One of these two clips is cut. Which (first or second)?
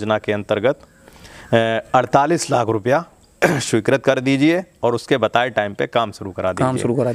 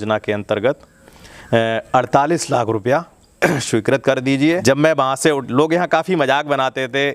second